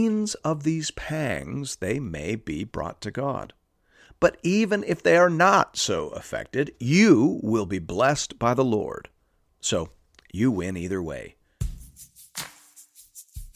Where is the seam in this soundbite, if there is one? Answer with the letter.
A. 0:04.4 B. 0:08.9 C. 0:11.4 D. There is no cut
C